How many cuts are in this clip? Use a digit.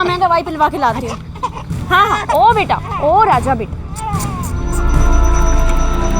1